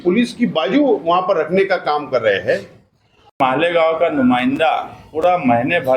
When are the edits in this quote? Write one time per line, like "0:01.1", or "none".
0:03.4